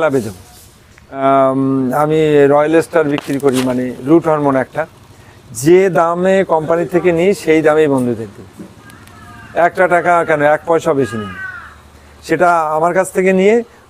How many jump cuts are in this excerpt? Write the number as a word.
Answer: one